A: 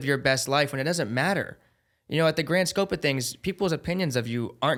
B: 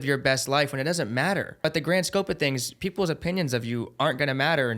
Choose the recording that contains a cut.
B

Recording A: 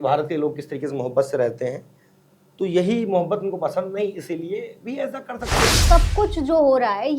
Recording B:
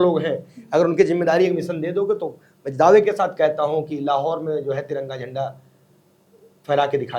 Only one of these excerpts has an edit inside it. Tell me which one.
A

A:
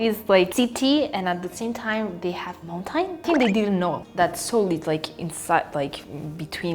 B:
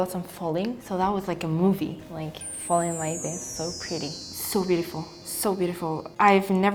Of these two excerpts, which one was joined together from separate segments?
A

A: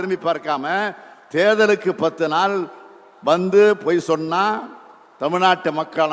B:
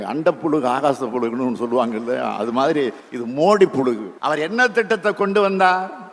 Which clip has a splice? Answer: B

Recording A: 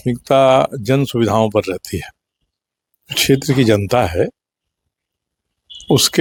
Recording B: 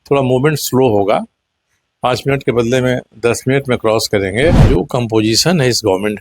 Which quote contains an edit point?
B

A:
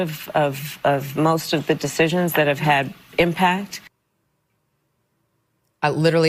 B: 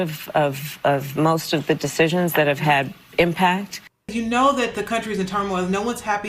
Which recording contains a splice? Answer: B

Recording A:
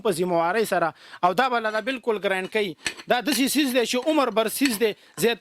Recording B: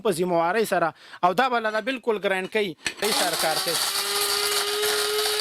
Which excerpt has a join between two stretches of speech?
B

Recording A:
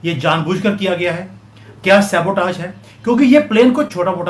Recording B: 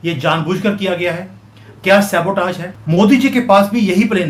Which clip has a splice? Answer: B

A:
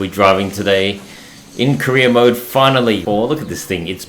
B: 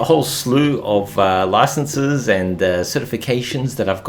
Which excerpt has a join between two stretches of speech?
A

